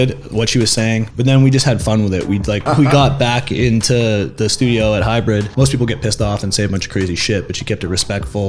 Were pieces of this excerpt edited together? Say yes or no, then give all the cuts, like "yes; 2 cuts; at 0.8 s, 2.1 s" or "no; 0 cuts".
yes; 3 cuts; at 1.1 s, 2.6 s, 5.5 s